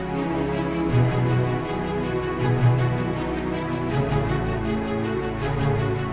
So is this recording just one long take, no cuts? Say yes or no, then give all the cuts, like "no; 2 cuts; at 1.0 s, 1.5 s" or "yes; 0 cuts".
yes; 0 cuts